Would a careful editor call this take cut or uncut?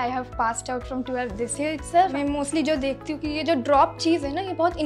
cut